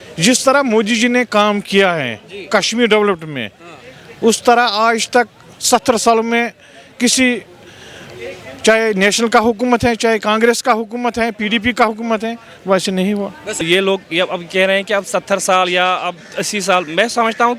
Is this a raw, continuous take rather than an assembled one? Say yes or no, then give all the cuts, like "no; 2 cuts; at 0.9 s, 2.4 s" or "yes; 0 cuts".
no; 1 cut; at 13.6 s